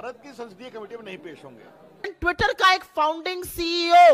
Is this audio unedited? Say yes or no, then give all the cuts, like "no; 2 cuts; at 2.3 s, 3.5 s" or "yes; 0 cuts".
no; 1 cut; at 2.1 s